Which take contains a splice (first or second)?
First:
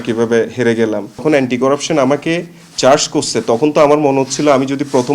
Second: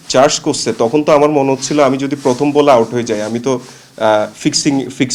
first